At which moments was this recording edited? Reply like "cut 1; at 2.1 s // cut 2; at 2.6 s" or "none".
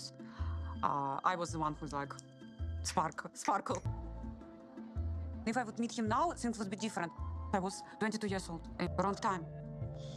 cut 1; at 3.3 s